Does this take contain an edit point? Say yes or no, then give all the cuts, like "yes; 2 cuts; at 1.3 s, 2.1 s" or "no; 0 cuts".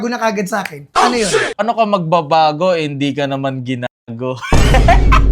yes; 1 cut; at 1.6 s